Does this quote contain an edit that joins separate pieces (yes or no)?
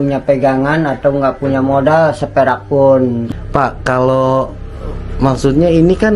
yes